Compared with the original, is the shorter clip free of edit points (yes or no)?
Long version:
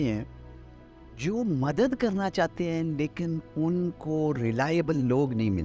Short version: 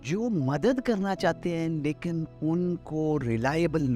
yes